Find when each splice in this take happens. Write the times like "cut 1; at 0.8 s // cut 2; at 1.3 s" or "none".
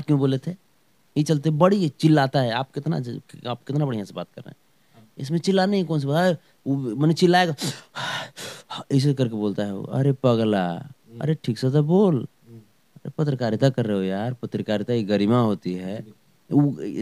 none